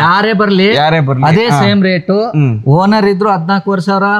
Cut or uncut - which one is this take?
uncut